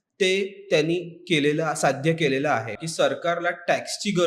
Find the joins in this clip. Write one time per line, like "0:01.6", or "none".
0:02.8